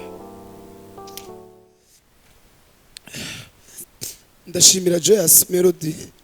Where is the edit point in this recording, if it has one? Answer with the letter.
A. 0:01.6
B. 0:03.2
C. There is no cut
A